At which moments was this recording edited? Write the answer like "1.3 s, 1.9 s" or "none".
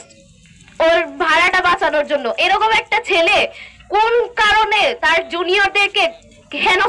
none